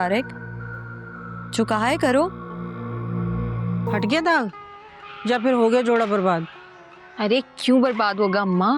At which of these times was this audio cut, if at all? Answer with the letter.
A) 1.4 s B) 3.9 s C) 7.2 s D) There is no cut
B